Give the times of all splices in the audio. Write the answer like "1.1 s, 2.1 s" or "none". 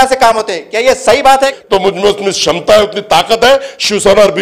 1.6 s